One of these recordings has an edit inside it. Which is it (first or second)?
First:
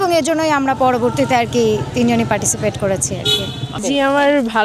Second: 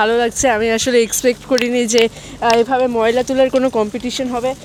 first